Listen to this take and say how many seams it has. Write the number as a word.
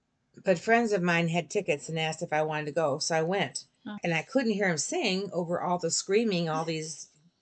one